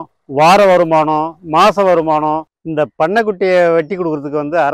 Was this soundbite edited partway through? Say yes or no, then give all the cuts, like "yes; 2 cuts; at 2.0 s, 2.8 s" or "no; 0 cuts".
yes; 1 cut; at 2.6 s